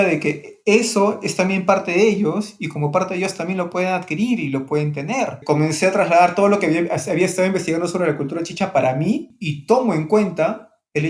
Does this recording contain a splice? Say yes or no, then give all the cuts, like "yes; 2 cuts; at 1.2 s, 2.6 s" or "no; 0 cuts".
yes; 2 cuts; at 5.4 s, 9.3 s